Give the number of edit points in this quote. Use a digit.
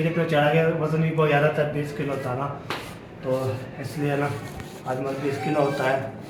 0